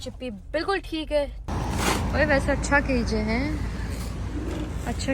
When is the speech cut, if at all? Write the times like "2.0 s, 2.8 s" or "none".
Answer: 1.4 s